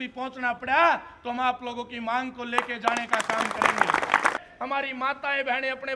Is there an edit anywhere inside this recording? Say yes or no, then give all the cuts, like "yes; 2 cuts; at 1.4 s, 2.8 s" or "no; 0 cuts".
yes; 1 cut; at 4.3 s